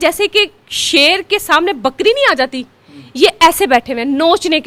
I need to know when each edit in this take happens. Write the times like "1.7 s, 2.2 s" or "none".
none